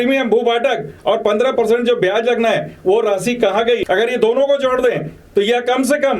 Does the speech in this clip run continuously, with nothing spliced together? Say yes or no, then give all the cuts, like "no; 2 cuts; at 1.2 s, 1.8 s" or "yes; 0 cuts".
no; 1 cut; at 3.8 s